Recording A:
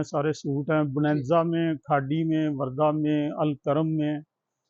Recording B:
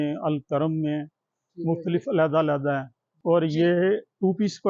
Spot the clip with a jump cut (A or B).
B